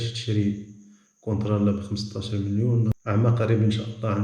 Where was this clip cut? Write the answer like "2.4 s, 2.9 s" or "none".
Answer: 3.0 s